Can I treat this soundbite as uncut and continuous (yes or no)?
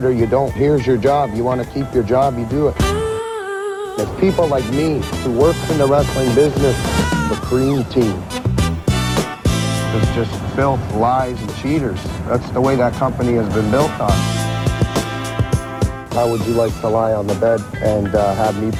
yes